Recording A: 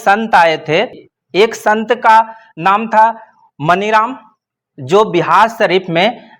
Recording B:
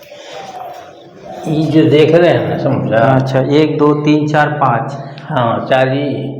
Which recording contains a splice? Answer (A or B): A